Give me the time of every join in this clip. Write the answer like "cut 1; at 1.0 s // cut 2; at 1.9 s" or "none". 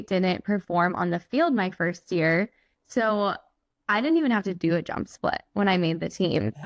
none